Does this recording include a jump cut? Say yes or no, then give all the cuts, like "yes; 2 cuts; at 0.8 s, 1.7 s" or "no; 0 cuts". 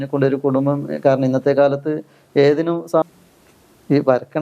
yes; 1 cut; at 3.0 s